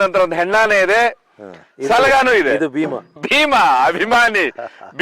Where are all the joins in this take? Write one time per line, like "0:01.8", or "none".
0:03.2

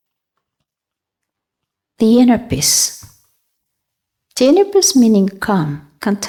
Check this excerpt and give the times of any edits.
none

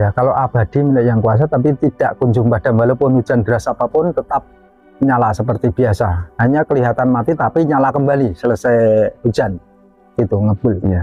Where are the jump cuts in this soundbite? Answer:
none

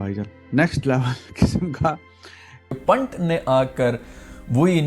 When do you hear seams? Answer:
0:02.7

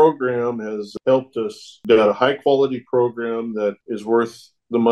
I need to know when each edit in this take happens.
0:00.9
0:01.7
0:03.8

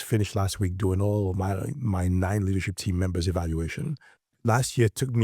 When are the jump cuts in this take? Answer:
0:04.3

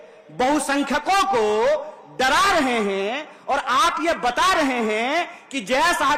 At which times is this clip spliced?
none

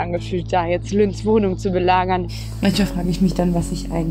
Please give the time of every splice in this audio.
0:02.4

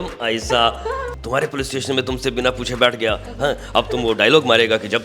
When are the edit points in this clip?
0:01.1

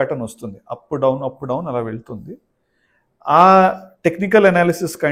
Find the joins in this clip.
none

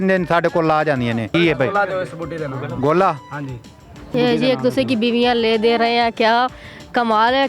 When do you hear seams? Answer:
0:01.3
0:04.1

